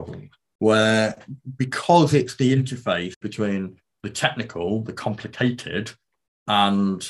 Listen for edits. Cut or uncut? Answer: cut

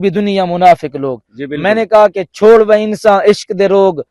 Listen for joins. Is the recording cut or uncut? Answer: uncut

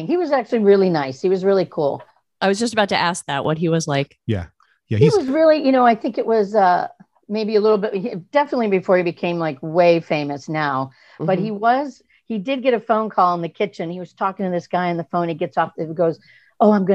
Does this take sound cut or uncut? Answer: uncut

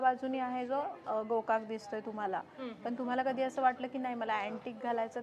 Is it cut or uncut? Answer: uncut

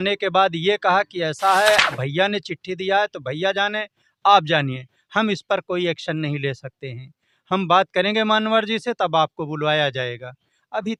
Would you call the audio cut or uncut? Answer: uncut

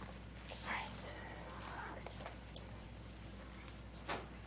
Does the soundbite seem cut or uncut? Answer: cut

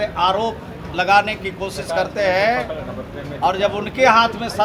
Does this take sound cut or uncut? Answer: uncut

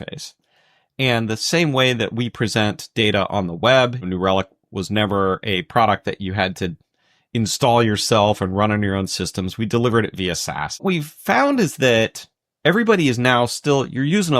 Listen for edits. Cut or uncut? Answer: cut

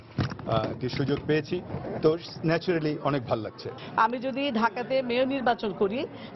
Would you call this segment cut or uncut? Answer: uncut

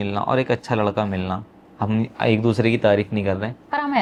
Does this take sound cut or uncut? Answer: uncut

